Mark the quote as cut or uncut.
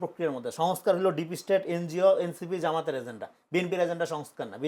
uncut